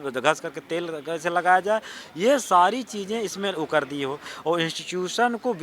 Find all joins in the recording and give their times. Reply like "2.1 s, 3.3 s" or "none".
4.3 s